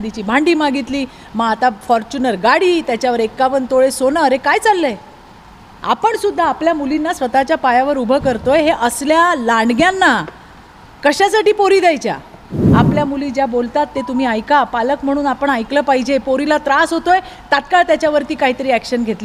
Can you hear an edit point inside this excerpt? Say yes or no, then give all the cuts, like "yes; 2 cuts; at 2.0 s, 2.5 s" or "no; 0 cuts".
yes; 1 cut; at 12.6 s